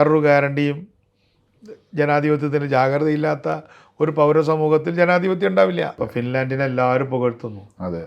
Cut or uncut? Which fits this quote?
cut